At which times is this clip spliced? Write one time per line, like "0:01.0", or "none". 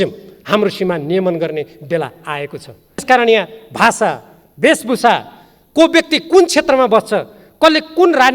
0:03.0